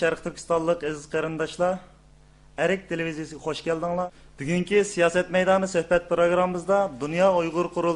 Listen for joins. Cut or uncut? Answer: cut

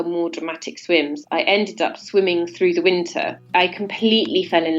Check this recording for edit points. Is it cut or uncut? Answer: cut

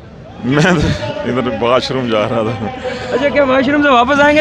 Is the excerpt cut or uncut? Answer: uncut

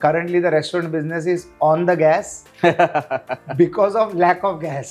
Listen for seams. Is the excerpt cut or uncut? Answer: uncut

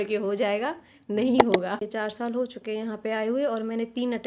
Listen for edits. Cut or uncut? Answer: cut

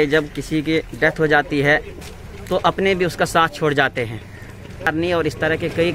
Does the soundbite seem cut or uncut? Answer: cut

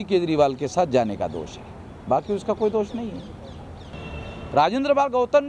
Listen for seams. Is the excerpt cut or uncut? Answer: cut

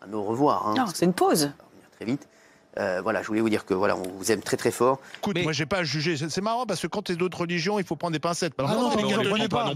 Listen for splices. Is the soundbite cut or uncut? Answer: cut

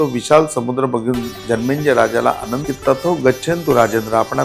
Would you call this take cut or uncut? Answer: cut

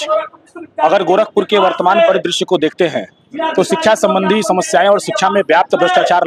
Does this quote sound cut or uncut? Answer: uncut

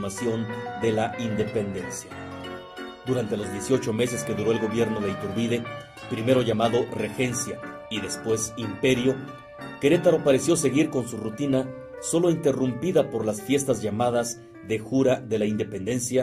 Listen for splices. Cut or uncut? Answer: cut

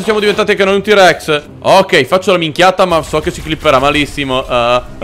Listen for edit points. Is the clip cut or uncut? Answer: cut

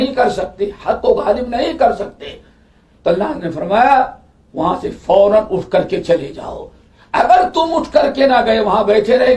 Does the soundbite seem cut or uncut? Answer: uncut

